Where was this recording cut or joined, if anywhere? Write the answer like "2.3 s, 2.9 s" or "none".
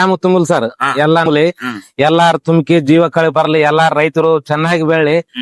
1.3 s